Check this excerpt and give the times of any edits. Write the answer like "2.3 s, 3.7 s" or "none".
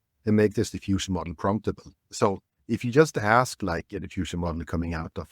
2.0 s